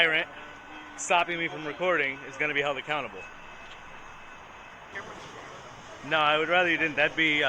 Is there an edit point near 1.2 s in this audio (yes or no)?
no